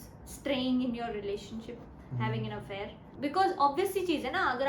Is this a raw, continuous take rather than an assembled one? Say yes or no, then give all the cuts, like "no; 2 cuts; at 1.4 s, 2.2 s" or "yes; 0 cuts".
no; 1 cut; at 3.1 s